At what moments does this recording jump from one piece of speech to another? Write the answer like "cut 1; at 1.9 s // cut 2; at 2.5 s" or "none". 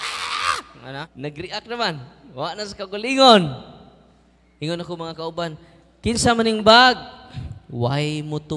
cut 1; at 1.1 s